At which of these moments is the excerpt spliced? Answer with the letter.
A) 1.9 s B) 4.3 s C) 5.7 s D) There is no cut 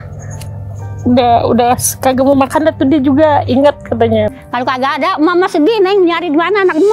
B